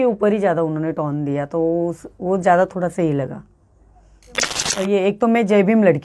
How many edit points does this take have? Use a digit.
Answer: 1